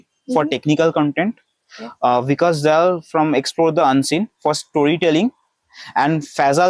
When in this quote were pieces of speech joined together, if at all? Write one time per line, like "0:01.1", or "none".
none

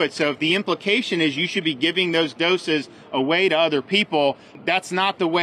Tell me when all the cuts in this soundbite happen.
0:04.5

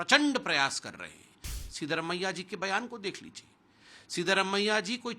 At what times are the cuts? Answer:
0:01.5

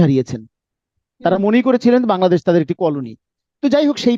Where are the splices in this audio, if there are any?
none

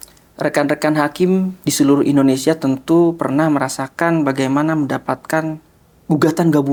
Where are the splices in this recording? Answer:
none

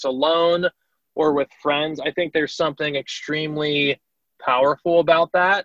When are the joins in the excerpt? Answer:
none

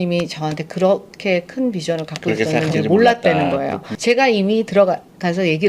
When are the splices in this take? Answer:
0:03.9

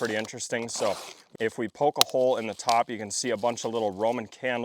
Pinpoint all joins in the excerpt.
0:01.3

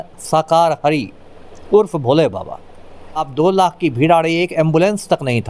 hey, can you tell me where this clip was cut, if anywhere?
0:03.3

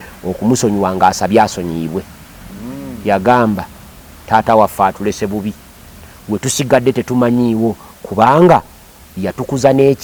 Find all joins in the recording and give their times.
none

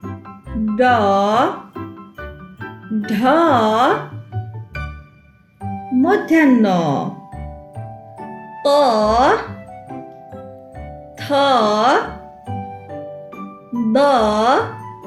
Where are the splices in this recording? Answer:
none

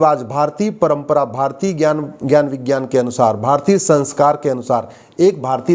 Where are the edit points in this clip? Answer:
none

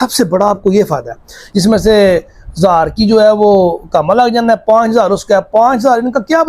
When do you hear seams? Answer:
0:01.5

